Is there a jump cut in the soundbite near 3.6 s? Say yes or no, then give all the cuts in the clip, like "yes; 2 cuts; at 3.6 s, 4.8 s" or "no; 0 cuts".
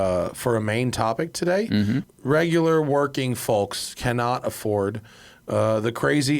no; 1 cut; at 2.1 s